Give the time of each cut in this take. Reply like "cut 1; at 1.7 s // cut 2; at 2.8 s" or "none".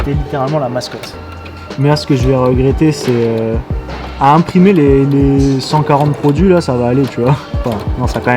cut 1; at 1.4 s